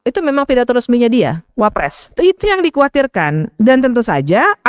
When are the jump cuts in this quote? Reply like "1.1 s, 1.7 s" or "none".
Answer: 2.2 s